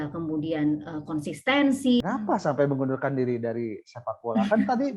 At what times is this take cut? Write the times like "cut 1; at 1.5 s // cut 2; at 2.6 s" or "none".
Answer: cut 1; at 2.0 s